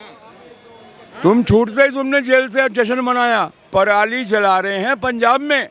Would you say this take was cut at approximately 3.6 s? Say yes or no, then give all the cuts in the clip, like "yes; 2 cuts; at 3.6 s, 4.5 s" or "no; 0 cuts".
yes; 1 cut; at 3.6 s